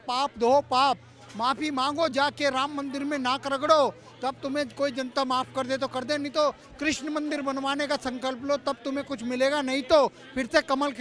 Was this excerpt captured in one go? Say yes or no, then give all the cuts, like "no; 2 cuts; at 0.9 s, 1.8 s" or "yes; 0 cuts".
yes; 0 cuts